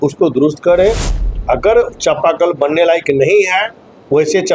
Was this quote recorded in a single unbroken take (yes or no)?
yes